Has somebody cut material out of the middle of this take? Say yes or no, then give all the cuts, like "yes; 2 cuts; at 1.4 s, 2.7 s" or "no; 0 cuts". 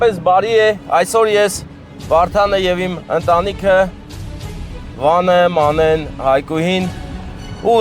no; 0 cuts